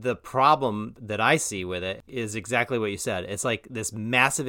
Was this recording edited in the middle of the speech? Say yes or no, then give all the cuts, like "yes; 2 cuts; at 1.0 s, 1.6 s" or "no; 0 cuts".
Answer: yes; 2 cuts; at 0.9 s, 2.0 s